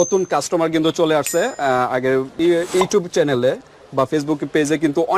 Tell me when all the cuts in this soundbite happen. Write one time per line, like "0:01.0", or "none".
0:02.3